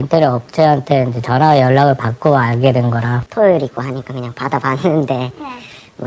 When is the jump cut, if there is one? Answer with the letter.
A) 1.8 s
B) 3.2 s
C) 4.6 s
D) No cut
B